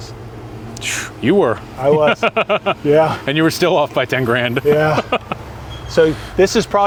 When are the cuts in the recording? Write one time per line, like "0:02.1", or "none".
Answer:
none